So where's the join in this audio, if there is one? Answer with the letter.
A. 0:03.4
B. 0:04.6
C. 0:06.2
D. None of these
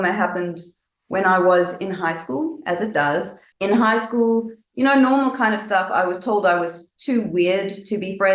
A